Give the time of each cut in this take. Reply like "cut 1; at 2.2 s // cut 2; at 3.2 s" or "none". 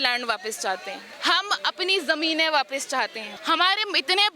cut 1; at 1.1 s // cut 2; at 3.3 s